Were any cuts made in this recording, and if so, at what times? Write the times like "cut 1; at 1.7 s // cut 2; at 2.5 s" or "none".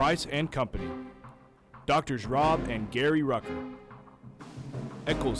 none